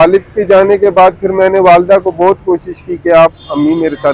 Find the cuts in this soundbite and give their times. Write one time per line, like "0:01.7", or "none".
none